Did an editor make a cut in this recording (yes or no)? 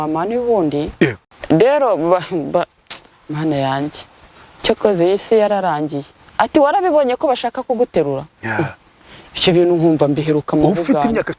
yes